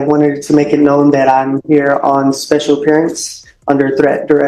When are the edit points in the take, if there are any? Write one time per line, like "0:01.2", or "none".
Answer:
none